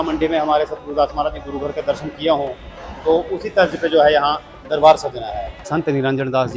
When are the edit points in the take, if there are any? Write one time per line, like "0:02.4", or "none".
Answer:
0:05.6